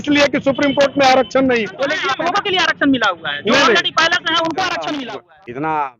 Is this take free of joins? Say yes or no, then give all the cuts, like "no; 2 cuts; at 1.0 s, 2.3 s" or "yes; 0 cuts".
no; 2 cuts; at 2.0 s, 4.8 s